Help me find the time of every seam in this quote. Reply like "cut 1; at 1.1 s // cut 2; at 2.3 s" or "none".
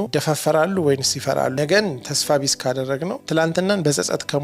cut 1; at 1.5 s